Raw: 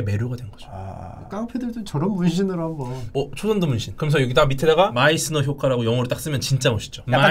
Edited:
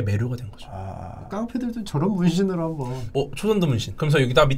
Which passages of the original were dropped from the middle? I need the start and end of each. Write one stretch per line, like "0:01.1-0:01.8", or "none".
none